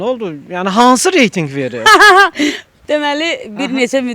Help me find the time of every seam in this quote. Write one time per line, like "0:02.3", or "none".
none